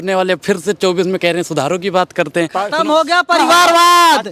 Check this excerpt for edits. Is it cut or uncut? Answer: cut